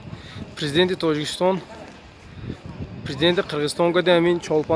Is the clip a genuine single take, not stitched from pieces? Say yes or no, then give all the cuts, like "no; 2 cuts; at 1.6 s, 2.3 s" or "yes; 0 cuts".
yes; 0 cuts